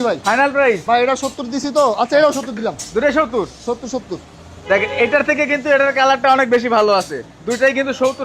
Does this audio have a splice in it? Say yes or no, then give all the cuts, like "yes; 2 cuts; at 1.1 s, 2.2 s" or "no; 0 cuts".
no; 0 cuts